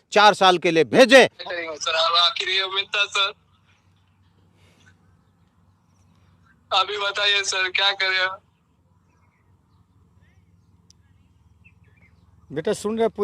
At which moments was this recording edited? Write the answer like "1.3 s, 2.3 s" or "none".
1.4 s